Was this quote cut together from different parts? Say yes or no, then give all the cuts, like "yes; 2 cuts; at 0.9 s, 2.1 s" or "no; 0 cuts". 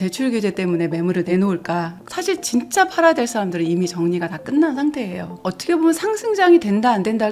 yes; 2 cuts; at 2.0 s, 5.3 s